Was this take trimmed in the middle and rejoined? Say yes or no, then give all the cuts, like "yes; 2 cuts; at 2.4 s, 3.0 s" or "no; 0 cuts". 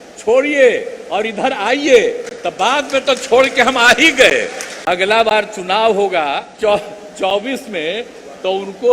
yes; 2 cuts; at 4.7 s, 6.5 s